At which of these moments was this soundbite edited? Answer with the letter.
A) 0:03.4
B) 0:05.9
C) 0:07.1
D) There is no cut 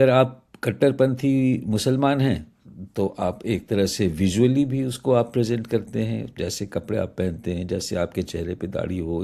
D